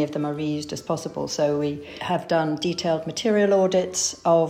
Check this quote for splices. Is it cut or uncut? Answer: cut